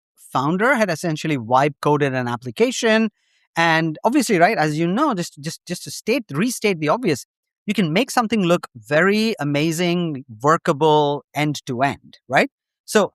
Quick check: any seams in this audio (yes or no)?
no